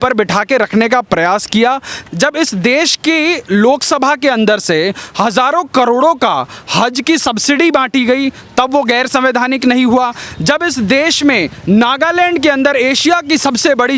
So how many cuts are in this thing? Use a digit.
2